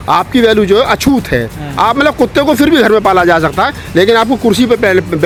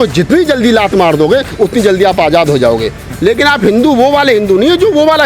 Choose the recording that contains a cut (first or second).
second